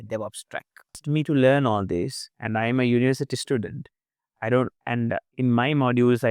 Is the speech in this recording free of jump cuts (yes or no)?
no